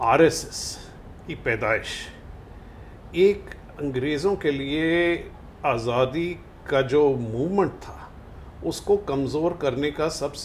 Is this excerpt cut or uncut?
uncut